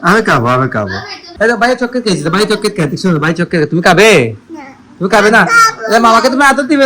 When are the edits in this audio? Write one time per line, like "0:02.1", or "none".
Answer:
0:01.2